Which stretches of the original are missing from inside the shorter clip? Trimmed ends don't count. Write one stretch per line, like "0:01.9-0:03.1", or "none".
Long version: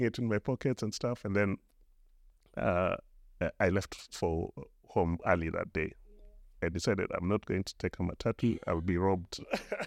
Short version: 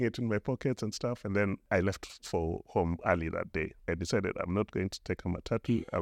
0:01.7-0:03.5
0:04.5-0:04.8
0:06.0-0:06.5